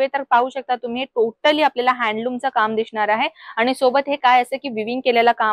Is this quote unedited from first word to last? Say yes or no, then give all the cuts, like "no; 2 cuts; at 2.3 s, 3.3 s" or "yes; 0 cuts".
yes; 0 cuts